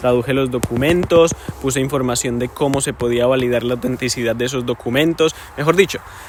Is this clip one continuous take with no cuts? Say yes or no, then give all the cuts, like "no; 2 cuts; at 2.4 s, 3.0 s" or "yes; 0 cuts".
yes; 0 cuts